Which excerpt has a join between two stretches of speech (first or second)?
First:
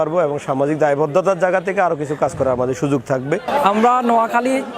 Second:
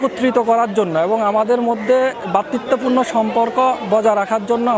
first